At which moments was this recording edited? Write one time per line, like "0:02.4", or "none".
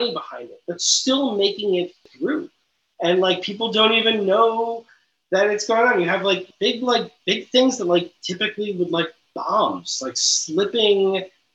0:02.1
0:06.5